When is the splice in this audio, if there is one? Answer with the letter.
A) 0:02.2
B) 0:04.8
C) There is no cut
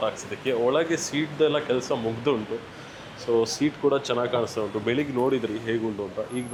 C